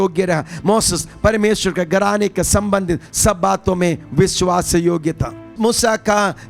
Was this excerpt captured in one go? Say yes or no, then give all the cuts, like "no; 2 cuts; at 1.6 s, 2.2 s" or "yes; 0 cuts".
no; 1 cut; at 5.5 s